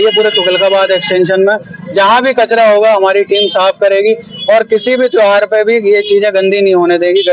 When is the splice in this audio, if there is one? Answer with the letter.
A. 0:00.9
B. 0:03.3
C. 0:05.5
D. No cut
D